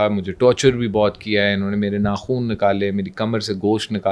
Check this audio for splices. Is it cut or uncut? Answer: uncut